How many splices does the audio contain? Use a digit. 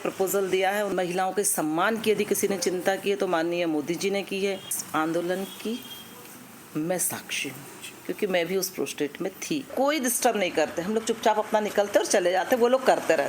3